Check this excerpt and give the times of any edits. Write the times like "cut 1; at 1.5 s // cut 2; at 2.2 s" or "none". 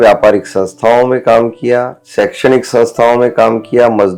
cut 1; at 2.0 s